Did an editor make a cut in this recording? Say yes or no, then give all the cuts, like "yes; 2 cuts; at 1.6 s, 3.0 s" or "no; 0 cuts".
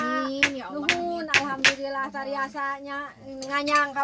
no; 0 cuts